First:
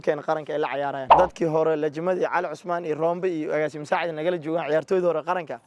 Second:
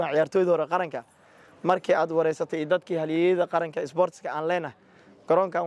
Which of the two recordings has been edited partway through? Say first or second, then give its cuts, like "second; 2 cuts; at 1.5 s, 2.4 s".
first; 1 cut; at 1.1 s